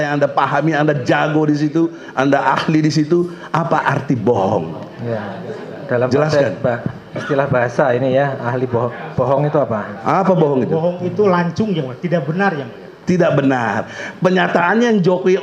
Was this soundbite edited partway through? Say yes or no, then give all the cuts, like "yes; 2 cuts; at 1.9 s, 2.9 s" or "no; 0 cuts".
no; 0 cuts